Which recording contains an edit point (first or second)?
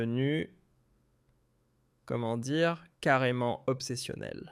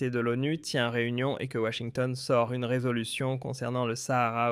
first